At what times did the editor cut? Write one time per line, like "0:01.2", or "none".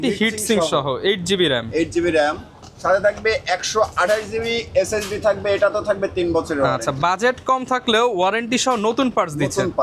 none